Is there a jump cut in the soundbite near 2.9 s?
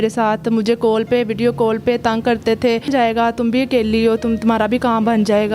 yes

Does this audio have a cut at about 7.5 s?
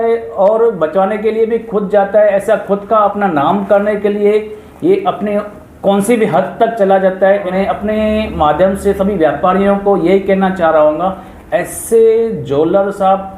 yes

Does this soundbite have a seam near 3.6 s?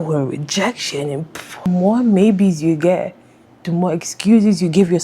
no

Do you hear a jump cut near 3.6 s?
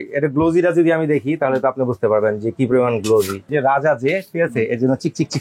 yes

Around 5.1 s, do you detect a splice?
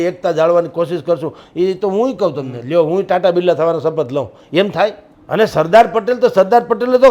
yes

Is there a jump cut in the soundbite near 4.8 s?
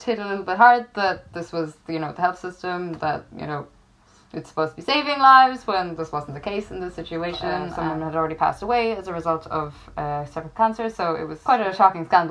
no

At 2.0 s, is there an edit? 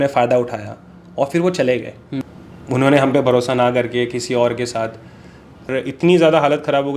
yes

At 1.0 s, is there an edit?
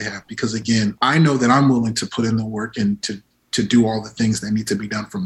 yes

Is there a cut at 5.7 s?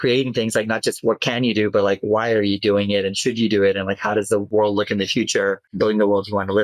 yes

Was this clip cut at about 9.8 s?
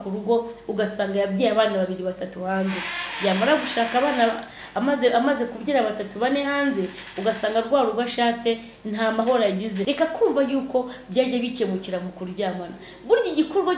yes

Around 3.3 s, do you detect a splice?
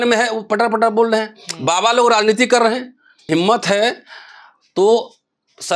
yes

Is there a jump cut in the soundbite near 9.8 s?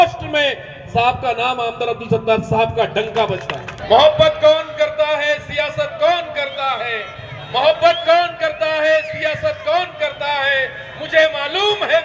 no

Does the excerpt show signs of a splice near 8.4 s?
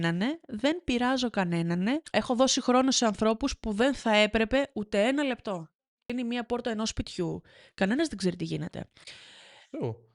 no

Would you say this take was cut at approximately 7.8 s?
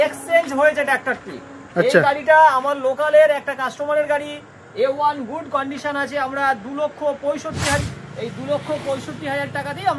yes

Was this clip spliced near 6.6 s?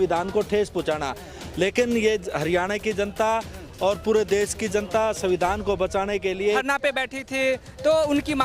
yes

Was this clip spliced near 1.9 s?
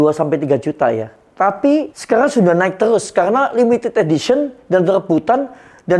yes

